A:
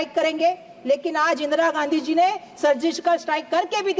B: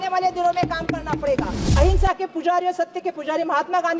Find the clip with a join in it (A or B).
B